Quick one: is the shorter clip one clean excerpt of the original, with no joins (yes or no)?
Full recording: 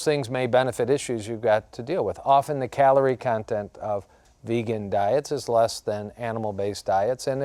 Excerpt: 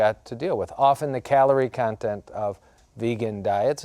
yes